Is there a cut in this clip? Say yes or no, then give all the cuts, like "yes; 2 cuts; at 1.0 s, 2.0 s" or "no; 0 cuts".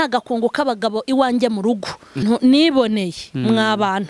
yes; 1 cut; at 2.2 s